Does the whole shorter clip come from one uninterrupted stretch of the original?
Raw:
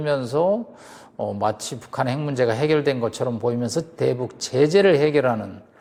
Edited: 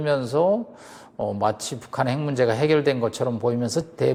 yes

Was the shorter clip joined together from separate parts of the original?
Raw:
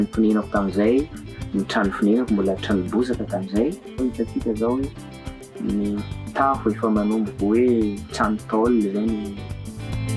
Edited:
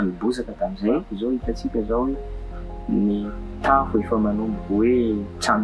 no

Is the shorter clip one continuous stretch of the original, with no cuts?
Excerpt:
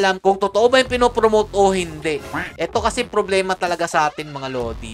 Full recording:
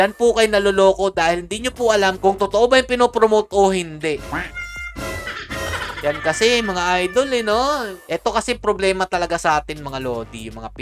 no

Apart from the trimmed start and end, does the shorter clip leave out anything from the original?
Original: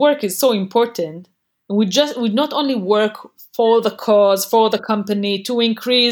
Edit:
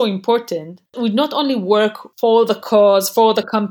yes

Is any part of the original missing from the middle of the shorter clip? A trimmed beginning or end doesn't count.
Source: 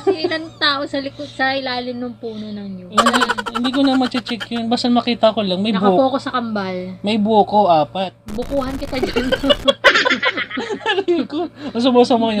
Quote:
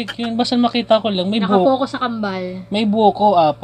no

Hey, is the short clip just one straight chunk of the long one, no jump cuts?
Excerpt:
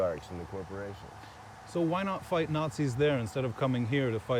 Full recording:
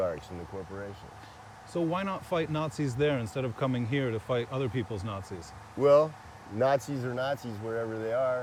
yes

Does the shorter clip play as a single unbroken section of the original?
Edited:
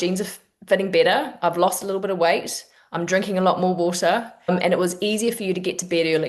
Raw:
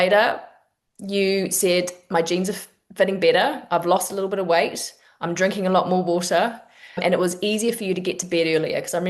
no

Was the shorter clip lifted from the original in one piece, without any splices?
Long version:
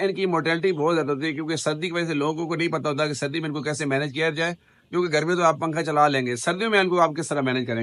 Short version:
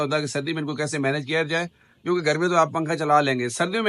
yes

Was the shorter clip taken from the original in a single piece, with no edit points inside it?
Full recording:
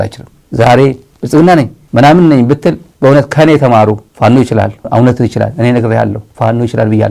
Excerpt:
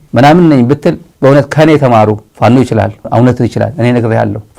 yes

